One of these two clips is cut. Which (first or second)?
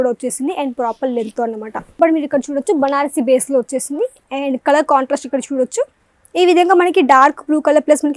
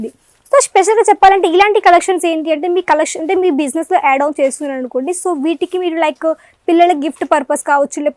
first